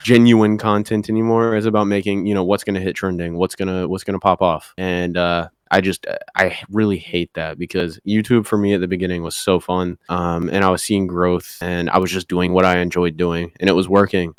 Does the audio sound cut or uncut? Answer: uncut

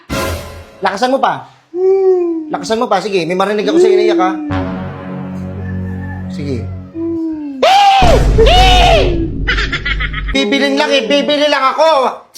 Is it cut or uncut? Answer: cut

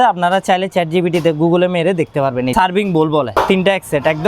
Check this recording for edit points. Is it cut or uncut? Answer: cut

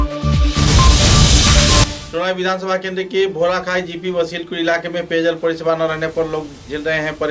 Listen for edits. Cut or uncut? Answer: uncut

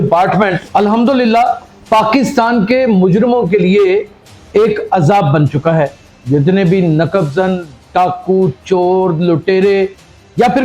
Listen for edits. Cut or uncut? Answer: uncut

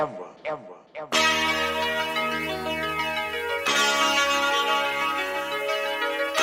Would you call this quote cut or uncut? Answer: cut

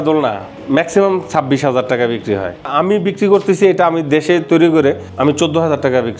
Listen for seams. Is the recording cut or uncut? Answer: uncut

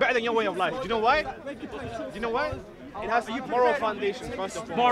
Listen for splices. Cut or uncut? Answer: uncut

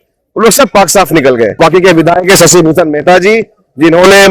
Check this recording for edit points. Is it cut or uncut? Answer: cut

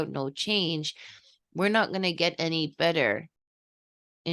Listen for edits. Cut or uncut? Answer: uncut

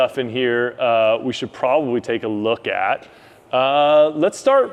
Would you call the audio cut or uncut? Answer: uncut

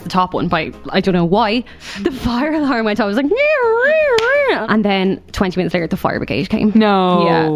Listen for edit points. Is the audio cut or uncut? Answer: cut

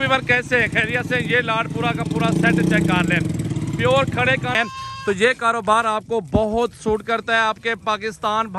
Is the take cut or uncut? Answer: cut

